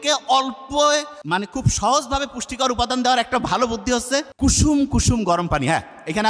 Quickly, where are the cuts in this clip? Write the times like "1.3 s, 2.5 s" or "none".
1.2 s, 4.3 s